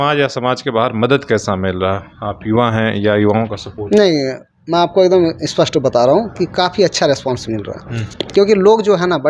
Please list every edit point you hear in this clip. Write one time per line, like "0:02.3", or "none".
none